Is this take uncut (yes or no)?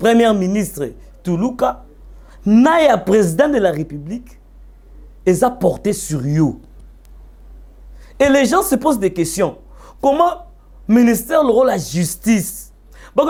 yes